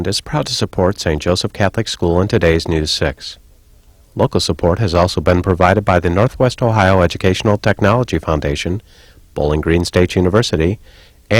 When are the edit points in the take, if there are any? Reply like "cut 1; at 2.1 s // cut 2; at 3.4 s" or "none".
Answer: none